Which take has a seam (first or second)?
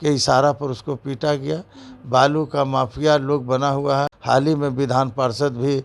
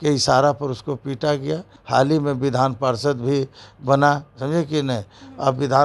second